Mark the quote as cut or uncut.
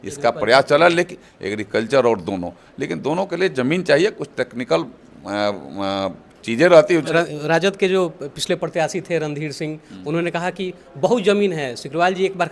cut